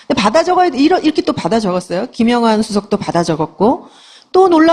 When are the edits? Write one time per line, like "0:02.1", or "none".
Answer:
none

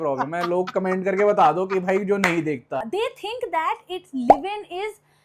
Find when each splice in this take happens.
0:02.8

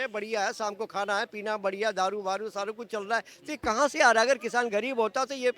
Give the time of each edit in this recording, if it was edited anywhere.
none

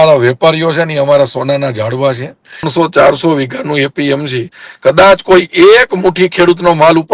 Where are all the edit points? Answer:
0:02.7

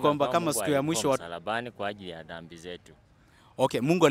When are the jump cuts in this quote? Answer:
0:01.2

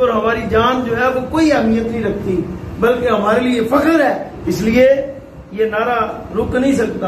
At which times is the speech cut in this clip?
0:04.3

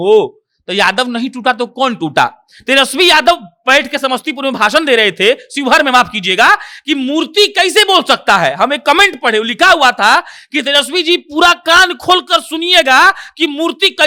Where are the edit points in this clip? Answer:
none

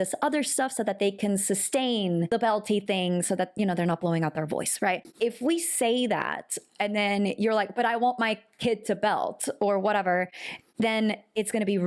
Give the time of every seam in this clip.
0:02.3
0:05.1

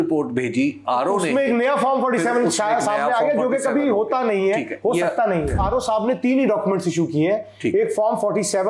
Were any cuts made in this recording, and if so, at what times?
0:05.6

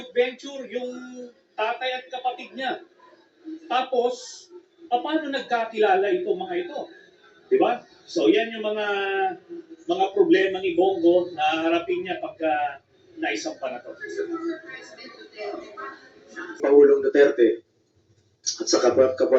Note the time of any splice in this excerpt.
0:16.6

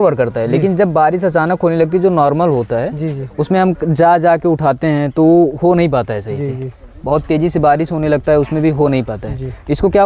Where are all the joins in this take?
none

